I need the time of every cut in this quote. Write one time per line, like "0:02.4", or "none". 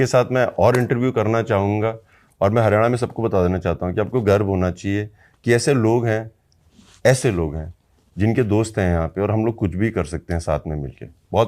none

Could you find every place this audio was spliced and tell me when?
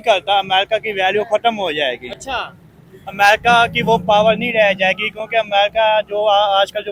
none

